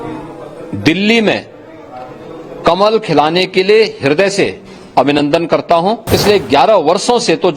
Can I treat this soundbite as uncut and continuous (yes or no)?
no